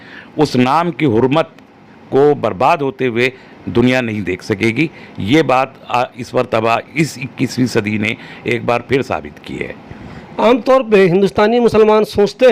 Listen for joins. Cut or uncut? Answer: uncut